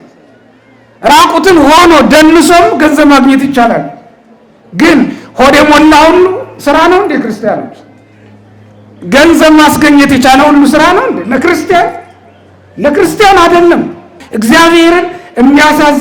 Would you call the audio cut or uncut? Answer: cut